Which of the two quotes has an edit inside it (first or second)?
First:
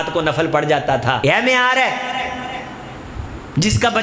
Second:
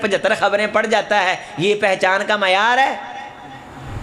first